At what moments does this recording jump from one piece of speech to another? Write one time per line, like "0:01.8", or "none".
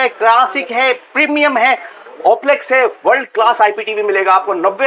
none